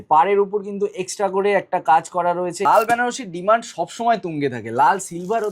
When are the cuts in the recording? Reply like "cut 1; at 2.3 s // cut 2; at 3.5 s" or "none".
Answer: cut 1; at 2.7 s